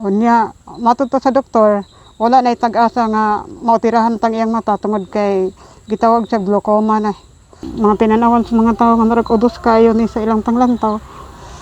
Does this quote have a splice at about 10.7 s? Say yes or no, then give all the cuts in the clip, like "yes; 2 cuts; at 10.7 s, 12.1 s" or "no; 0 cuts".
no; 1 cut; at 7.7 s